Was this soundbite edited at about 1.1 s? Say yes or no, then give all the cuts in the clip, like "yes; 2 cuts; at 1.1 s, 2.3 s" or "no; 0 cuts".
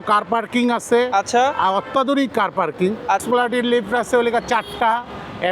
no; 1 cut; at 3.2 s